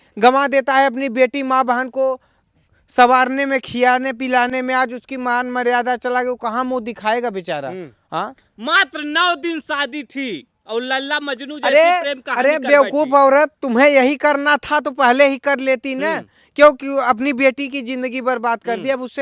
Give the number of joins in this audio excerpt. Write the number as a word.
zero